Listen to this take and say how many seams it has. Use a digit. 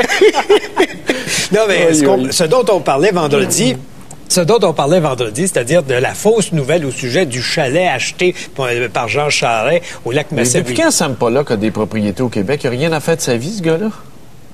0